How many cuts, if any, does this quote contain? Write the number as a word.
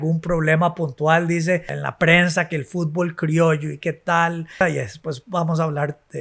two